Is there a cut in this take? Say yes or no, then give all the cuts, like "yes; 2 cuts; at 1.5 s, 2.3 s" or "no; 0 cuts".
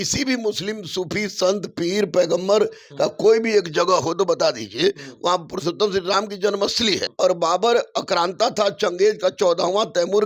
yes; 1 cut; at 7.1 s